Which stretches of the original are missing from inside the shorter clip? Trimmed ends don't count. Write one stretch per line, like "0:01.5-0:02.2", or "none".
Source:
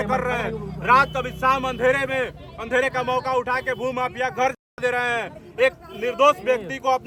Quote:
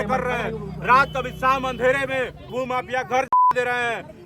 0:02.5-0:03.7